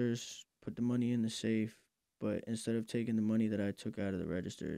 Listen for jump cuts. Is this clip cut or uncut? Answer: uncut